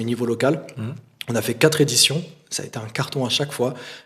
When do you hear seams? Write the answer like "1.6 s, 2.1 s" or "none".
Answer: none